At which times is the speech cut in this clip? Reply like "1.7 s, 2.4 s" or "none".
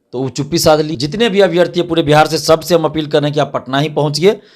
1.0 s